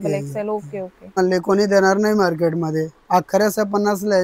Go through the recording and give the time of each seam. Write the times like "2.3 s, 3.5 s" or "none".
1.2 s